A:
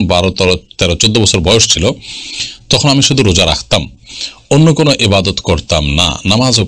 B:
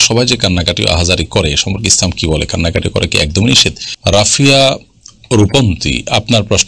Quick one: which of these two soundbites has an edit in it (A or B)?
B